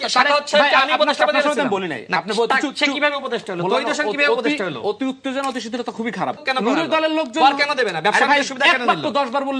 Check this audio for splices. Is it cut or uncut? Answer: cut